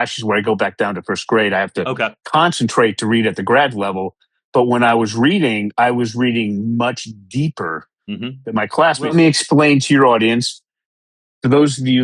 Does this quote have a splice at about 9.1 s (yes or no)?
yes